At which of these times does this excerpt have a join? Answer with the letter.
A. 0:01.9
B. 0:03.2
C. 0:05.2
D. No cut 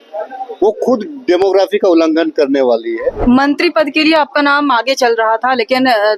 B